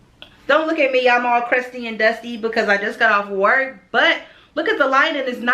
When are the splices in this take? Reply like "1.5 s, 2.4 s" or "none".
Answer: none